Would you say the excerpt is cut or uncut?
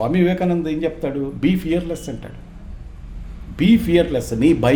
uncut